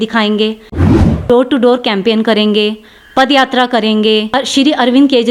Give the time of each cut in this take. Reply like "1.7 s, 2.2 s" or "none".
0.9 s, 4.3 s